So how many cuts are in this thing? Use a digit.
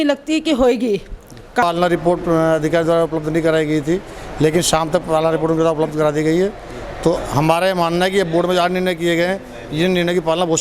1